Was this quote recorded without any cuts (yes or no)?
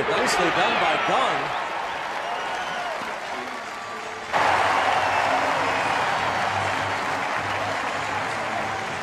yes